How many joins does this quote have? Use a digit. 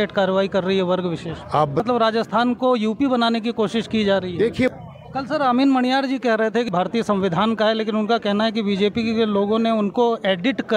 3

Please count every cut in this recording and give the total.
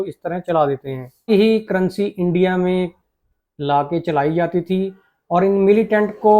1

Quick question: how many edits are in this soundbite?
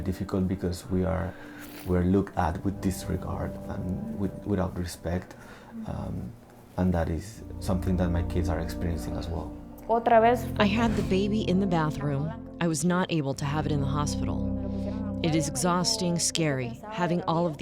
1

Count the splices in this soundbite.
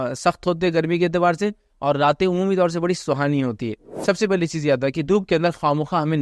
1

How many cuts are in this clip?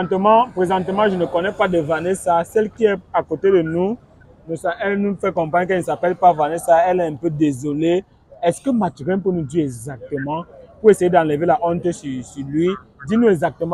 0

